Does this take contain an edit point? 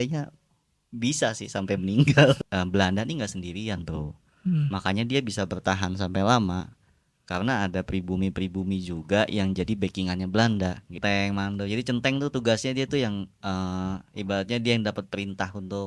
yes; 2 cuts; at 2.4 s, 11.0 s

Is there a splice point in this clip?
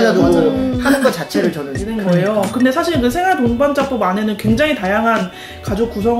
yes; 1 cut; at 1.9 s

